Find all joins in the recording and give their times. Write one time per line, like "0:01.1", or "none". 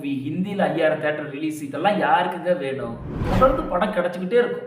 0:03.1